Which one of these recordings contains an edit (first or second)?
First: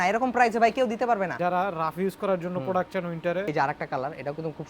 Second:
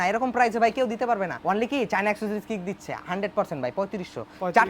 first